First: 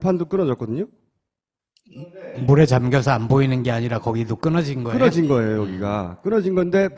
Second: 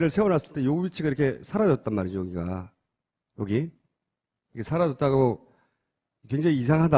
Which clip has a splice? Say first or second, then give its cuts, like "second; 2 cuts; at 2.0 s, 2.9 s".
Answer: second; 1 cut; at 3.9 s